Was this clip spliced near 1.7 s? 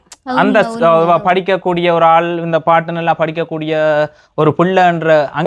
no; 0 cuts

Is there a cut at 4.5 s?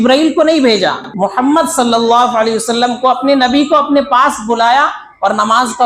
no; 1 cut; at 1.1 s

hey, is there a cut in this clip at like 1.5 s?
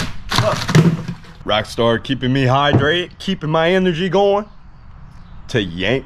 yes; 1 cut; at 1.5 s

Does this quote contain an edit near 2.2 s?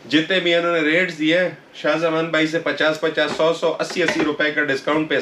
no; 0 cuts

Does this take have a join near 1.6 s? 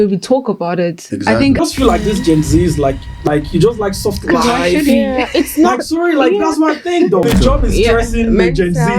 yes; 3 cuts; at 1.6 s, 3.3 s, 7.2 s

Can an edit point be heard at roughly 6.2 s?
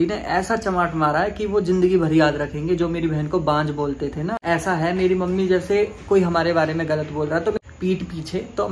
no; 2 cuts; at 4.4 s, 7.6 s

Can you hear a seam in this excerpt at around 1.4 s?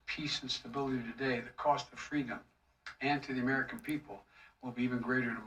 no; 0 cuts

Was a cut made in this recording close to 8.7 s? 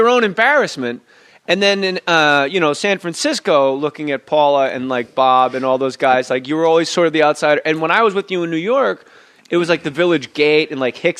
yes; 1 cut; at 8.7 s

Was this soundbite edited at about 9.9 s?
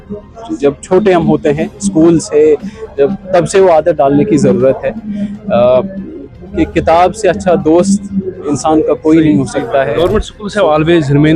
yes; 1 cut; at 9.9 s

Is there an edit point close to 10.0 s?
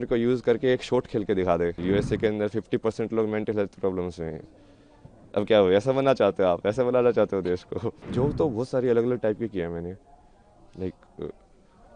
no; 2 cuts; at 1.8 s, 8.0 s

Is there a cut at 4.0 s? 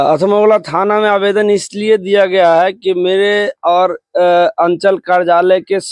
no; 0 cuts

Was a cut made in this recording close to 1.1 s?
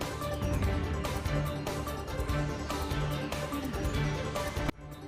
no; 1 cut; at 3.2 s

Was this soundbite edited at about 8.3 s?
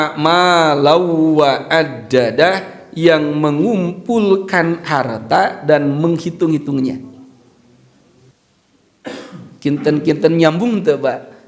yes; 1 cut; at 8.3 s

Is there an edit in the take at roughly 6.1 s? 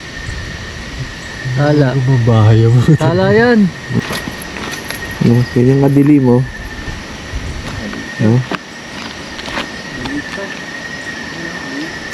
no; 1 cut; at 3.9 s

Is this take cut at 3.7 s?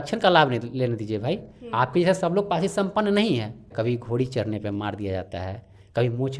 yes; 1 cut; at 3.7 s

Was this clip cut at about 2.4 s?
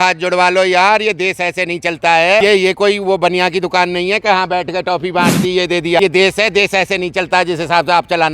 yes; 2 cuts; at 2.4 s, 6.0 s

